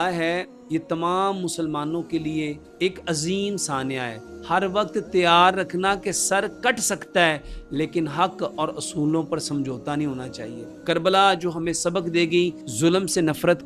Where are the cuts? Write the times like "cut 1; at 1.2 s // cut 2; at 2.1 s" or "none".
cut 1; at 2.6 s // cut 2; at 4.3 s // cut 3; at 10.7 s // cut 4; at 12.6 s